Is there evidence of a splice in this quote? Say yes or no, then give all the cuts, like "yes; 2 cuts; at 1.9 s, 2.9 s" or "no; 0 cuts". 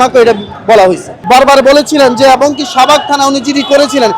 yes; 1 cut; at 1.1 s